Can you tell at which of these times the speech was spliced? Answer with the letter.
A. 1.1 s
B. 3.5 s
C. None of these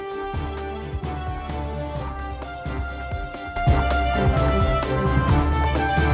C